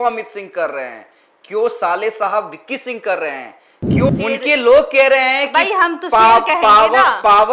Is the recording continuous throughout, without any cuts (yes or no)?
no